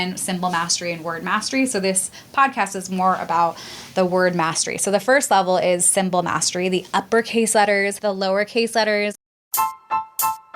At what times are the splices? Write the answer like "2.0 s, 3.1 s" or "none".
7.9 s, 9.2 s